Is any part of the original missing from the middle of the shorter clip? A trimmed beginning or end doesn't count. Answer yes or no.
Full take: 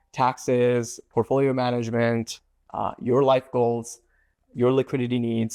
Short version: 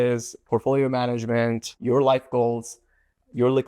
yes